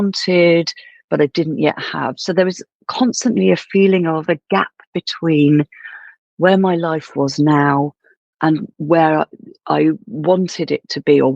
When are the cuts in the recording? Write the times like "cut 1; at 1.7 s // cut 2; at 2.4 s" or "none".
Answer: none